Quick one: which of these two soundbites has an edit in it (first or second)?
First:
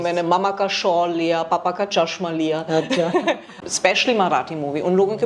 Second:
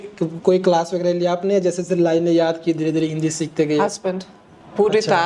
first